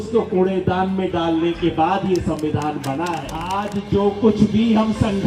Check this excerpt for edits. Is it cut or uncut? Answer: cut